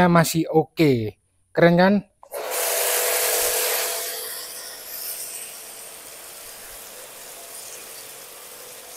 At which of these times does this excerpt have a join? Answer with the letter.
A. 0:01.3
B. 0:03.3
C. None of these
C